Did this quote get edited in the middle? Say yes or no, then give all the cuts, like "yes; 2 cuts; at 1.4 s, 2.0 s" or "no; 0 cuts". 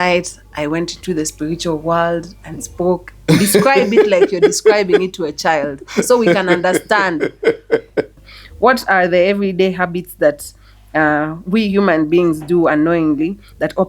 yes; 1 cut; at 8.1 s